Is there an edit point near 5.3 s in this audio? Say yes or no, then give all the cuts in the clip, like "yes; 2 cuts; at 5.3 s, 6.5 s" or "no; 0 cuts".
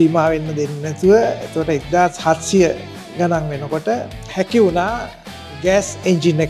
no; 0 cuts